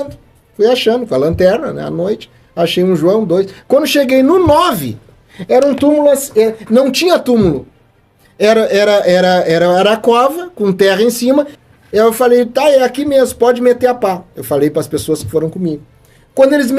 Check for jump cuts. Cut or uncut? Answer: cut